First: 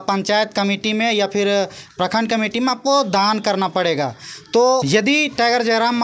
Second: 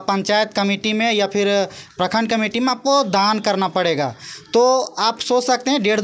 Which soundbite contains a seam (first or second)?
first